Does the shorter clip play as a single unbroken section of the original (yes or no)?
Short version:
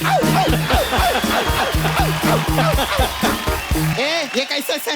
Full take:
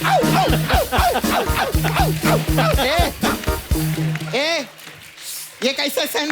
no